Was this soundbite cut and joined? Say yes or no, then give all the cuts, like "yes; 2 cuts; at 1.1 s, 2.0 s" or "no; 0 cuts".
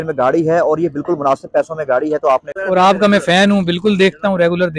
yes; 1 cut; at 2.5 s